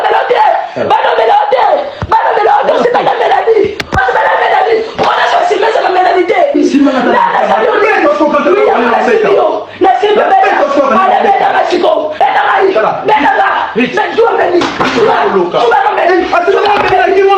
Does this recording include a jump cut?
no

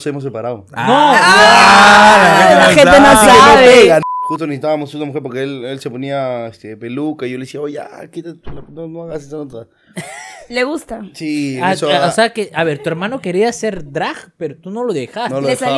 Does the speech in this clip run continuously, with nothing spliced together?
no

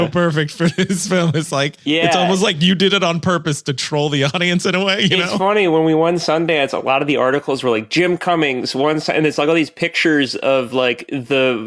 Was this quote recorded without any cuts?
no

